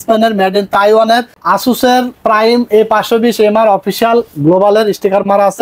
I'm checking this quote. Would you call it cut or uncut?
cut